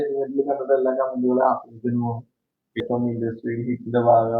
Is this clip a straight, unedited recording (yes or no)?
no